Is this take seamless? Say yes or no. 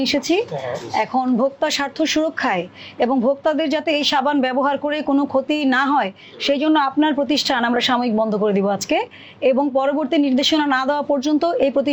yes